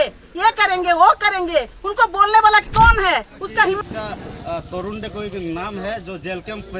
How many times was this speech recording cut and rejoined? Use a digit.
1